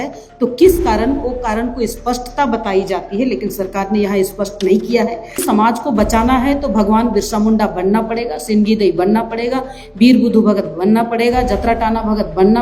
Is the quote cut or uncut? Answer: cut